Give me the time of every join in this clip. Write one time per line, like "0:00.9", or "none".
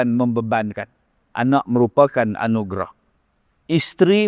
none